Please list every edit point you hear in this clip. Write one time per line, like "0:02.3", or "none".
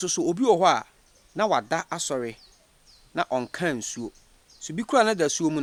none